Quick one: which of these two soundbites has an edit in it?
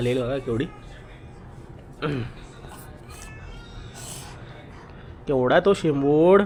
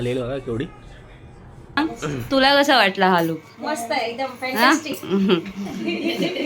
second; 1 cut; at 1.8 s

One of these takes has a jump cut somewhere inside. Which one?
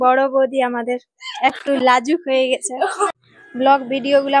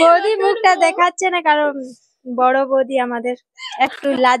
first; 1 cut; at 3.1 s

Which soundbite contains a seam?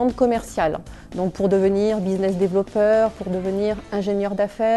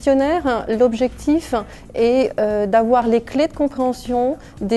first; 1 cut; at 3.4 s

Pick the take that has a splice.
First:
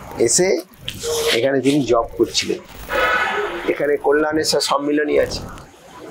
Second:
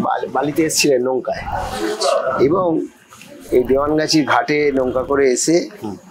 first; 1 cut; at 2.8 s

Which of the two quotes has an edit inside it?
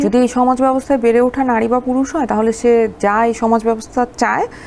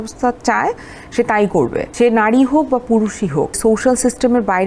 second; 2 cuts; at 1.8 s, 3.6 s

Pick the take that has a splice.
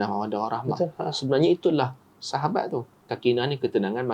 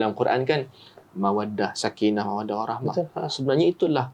first; 1 cut; at 3.1 s

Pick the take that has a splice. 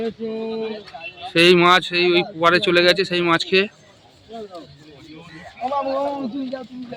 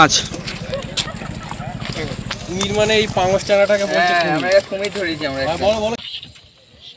second; 1 cut; at 6.0 s

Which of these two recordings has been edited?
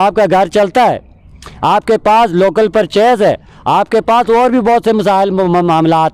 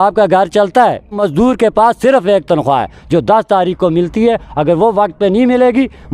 second; 1 cut; at 1.2 s

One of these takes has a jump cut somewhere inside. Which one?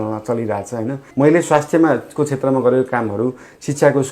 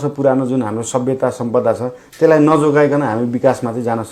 first; 1 cut; at 1.0 s

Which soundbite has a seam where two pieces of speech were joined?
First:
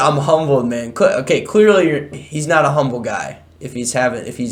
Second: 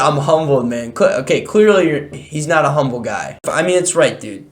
second; 1 cut; at 3.5 s

